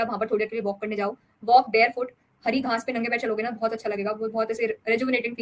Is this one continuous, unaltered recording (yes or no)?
yes